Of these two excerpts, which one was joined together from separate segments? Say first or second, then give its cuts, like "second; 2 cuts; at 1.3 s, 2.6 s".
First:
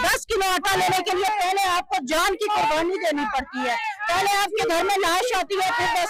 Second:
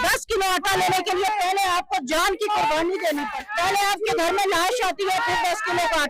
second; 1 cut; at 3.4 s